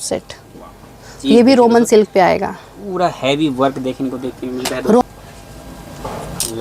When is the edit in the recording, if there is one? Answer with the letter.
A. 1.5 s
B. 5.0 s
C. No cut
B